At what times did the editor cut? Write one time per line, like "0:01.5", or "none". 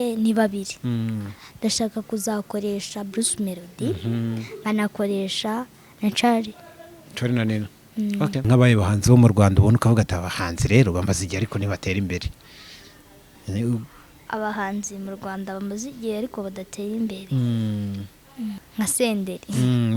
0:08.4
0:18.6